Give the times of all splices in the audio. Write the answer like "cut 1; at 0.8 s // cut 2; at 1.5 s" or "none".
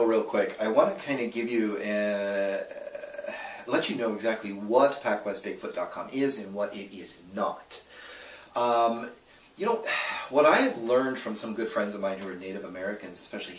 none